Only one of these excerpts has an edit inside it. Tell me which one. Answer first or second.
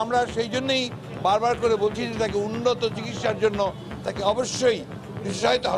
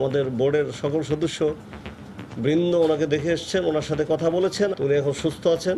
second